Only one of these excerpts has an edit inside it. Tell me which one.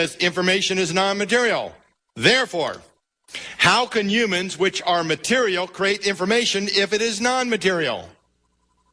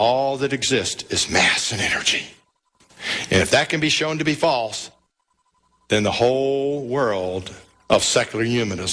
second; 1 cut; at 6.9 s

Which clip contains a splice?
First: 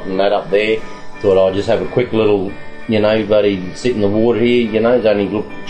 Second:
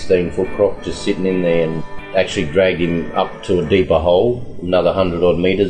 second; 1 cut; at 1.8 s

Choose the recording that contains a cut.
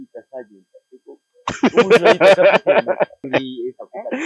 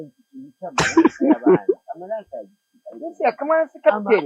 first; 1 cut; at 3.2 s

